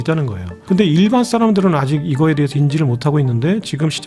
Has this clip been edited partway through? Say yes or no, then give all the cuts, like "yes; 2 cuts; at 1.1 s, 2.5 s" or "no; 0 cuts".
yes; 1 cut; at 2.5 s